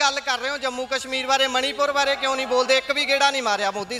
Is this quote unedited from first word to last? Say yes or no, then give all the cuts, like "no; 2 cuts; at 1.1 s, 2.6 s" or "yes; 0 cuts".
yes; 0 cuts